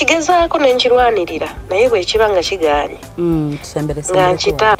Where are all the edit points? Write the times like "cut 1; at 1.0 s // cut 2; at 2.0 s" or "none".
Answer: none